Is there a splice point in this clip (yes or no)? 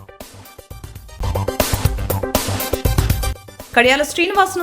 yes